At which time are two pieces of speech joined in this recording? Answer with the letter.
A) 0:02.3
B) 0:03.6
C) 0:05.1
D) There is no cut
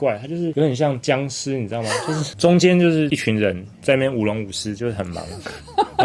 A